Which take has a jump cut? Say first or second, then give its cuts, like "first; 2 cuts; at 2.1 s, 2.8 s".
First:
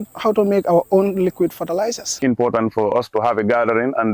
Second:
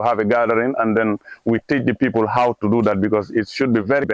first; 1 cut; at 2.2 s